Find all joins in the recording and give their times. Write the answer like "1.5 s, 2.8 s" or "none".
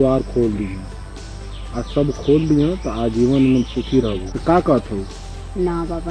4.3 s